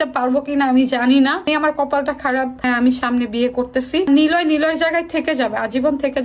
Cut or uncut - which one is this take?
cut